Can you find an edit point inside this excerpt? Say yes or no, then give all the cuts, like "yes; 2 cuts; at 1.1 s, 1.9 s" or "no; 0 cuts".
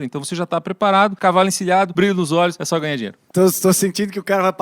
yes; 3 cuts; at 1.2 s, 1.9 s, 2.7 s